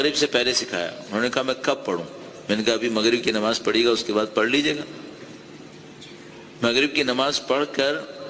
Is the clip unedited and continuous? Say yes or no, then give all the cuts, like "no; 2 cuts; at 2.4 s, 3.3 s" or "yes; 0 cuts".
yes; 0 cuts